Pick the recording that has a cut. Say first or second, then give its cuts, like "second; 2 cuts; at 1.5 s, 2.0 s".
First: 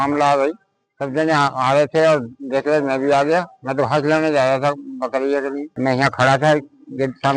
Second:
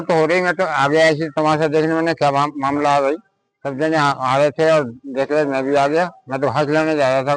first; 1 cut; at 5.7 s